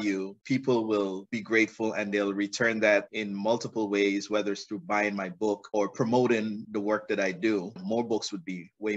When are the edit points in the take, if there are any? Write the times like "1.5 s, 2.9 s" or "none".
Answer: 7.7 s